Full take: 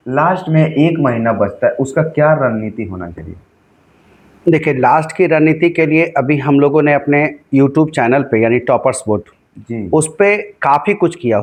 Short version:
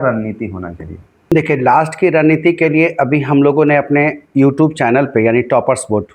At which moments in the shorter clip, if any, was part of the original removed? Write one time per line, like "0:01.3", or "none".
0:01.3